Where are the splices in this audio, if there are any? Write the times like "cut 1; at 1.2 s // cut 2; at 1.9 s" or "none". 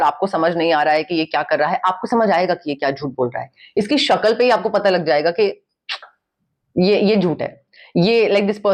none